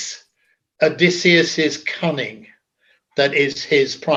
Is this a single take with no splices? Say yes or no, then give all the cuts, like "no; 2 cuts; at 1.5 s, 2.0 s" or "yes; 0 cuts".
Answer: yes; 0 cuts